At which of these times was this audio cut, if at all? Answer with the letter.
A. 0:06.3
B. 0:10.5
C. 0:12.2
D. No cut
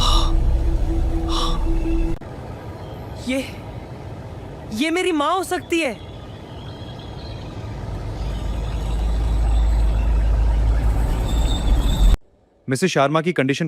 C